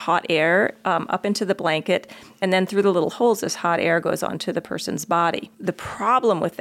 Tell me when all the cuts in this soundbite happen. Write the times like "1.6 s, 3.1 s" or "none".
5.5 s